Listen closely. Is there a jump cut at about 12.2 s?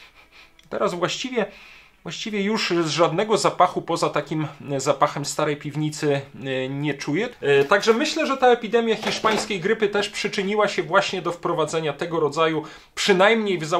no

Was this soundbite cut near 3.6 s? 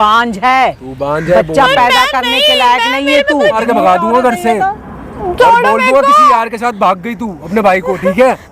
yes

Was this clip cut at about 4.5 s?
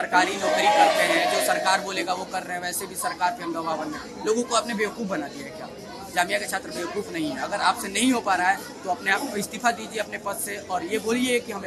no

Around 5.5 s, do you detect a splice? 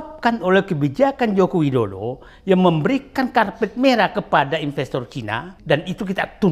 yes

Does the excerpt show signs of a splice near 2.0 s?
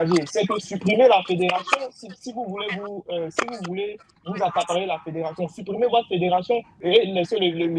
no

